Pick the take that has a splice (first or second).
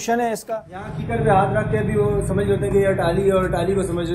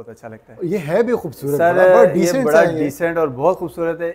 first